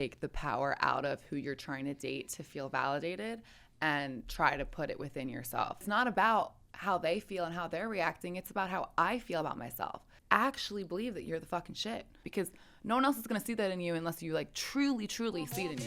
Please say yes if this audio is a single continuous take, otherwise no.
no